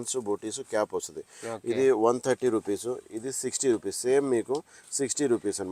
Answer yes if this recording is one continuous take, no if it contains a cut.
yes